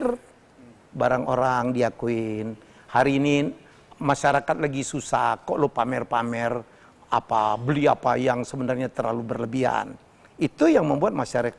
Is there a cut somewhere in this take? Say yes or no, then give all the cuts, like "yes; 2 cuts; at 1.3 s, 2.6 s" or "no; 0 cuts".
no; 0 cuts